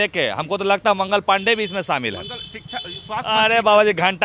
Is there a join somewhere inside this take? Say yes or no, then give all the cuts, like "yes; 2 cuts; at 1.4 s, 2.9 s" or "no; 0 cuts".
no; 0 cuts